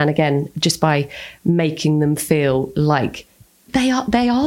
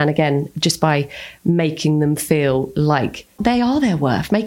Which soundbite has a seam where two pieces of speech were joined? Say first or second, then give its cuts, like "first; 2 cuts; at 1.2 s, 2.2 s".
second; 1 cut; at 3.4 s